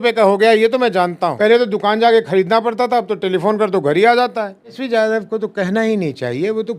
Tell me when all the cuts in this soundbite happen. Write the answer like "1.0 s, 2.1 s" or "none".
1.3 s, 4.8 s